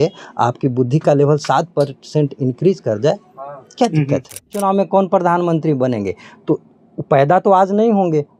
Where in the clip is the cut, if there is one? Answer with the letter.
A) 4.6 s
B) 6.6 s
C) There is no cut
A